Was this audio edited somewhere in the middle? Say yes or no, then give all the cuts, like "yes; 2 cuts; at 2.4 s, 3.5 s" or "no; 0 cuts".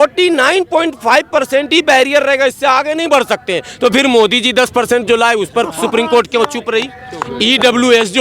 no; 0 cuts